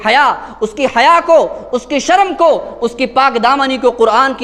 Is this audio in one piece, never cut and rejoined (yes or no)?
yes